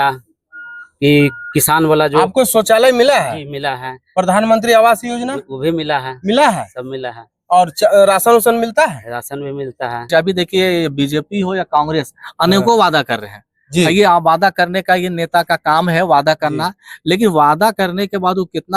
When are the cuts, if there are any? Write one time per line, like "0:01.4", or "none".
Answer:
0:10.1